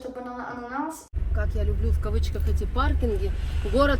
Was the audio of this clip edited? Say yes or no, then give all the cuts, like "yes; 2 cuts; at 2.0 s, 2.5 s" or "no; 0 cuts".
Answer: yes; 1 cut; at 1.0 s